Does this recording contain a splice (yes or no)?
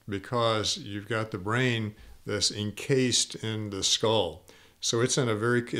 no